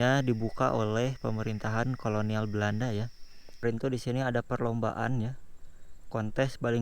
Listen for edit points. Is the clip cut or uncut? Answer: cut